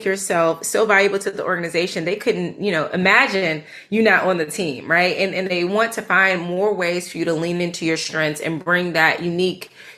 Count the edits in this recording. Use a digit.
0